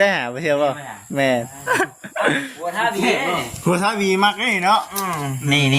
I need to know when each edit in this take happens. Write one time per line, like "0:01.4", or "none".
0:01.7